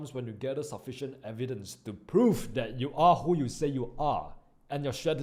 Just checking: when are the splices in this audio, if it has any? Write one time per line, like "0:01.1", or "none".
none